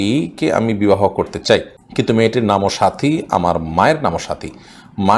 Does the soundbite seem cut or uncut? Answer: cut